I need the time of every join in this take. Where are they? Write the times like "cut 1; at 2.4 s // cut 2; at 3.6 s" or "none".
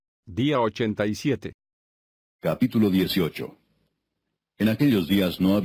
none